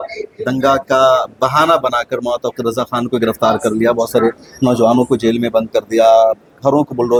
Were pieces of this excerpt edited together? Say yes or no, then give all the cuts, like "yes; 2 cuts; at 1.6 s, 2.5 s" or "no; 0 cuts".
no; 0 cuts